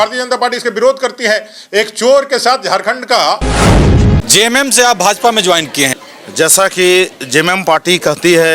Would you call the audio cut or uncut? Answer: cut